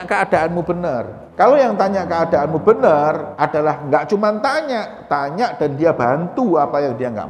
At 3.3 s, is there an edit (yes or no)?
yes